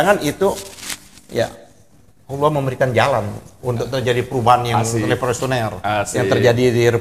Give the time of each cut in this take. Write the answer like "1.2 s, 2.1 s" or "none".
none